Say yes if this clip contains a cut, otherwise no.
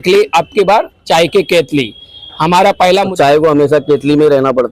yes